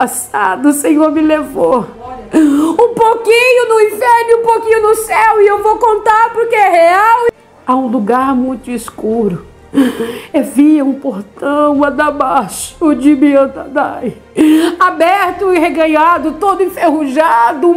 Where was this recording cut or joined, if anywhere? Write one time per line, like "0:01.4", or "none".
0:07.3